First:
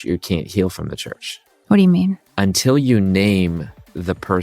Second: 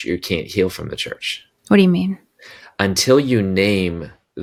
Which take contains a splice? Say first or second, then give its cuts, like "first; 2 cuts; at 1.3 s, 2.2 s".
first; 1 cut; at 2.3 s